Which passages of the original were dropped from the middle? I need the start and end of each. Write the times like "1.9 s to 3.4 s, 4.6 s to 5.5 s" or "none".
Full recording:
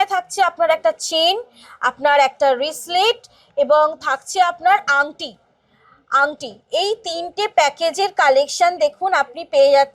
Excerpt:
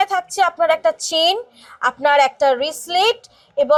none